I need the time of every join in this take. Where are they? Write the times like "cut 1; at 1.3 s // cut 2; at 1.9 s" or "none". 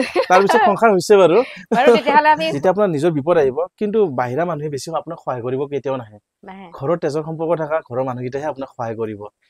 cut 1; at 2.5 s